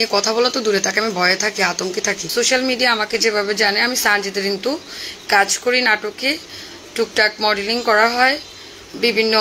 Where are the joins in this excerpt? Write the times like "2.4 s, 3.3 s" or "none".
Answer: 2.2 s